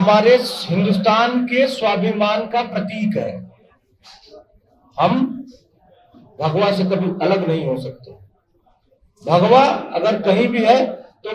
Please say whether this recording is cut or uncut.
uncut